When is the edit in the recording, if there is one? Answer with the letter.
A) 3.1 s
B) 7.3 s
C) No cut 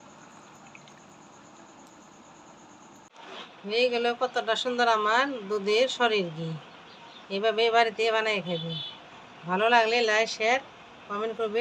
A